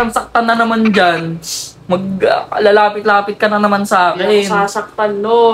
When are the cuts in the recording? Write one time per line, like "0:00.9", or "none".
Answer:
none